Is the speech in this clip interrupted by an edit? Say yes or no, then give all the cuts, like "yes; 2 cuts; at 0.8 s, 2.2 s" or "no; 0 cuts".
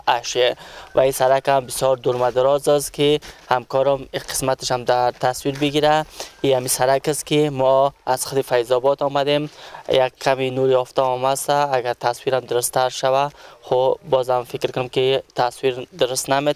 no; 0 cuts